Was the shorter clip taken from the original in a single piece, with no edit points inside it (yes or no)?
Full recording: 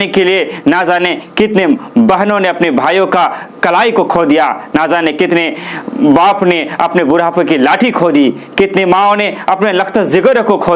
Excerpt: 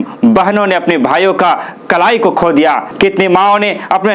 no